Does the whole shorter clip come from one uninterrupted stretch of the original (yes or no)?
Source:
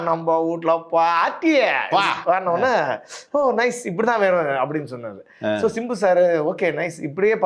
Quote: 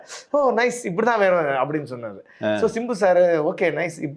yes